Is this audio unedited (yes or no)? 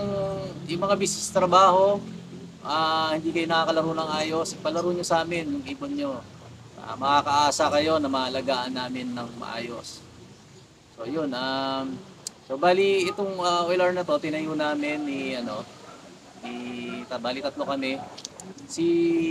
yes